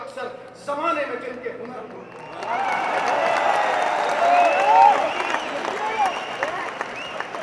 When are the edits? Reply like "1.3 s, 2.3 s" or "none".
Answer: none